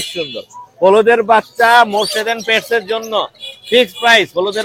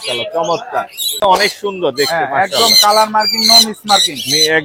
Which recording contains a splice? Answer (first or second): second